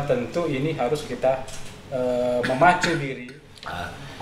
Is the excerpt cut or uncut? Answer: cut